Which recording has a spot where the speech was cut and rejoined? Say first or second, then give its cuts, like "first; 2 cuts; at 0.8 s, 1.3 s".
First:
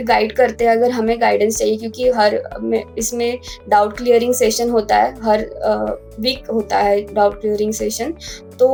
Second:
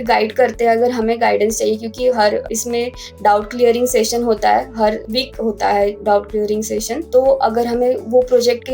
second; 3 cuts; at 2.5 s, 5.0 s, 7.0 s